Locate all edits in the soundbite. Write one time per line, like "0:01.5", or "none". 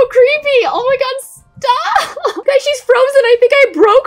0:02.4